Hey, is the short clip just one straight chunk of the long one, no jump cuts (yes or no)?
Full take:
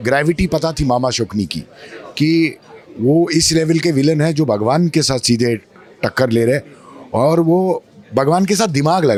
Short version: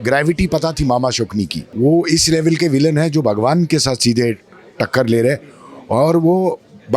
no